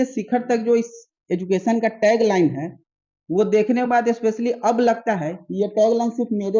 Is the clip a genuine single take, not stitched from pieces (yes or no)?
yes